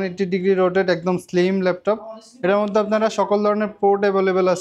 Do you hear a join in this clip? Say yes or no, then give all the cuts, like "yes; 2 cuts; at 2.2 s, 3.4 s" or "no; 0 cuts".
no; 0 cuts